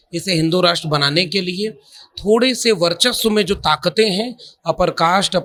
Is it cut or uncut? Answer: uncut